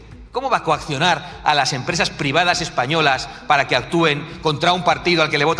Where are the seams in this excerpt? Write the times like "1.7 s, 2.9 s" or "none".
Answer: none

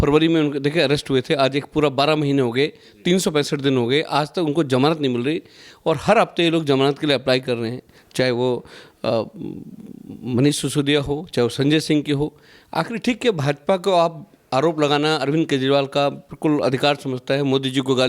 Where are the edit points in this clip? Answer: none

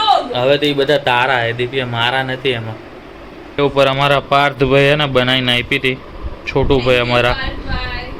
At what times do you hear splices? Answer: 3.6 s

